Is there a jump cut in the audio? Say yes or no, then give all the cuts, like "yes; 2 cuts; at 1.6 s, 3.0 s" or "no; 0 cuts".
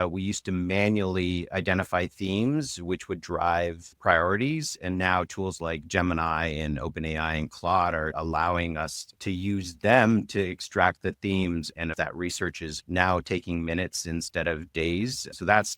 yes; 1 cut; at 11.9 s